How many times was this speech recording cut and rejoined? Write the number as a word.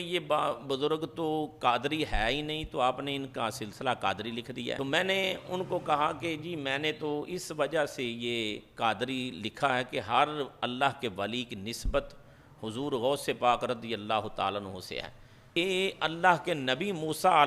two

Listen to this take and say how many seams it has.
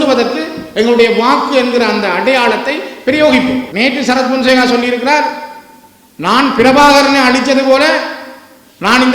one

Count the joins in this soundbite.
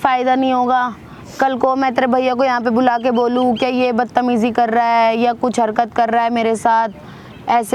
zero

